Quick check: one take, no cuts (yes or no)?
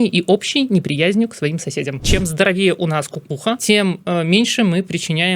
no